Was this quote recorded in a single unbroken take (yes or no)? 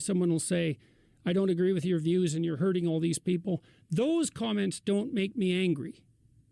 no